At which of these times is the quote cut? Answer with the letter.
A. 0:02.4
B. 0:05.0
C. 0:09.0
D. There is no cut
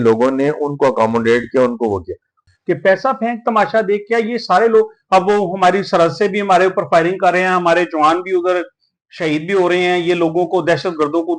A